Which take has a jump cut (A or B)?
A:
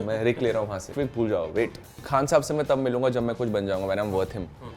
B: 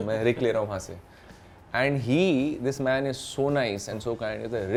A